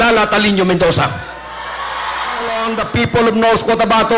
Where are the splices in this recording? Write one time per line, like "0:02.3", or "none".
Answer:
0:02.6